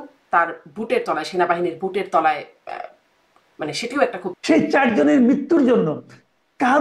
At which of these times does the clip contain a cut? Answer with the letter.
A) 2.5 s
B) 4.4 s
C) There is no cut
B